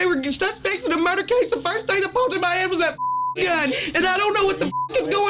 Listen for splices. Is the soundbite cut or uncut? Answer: cut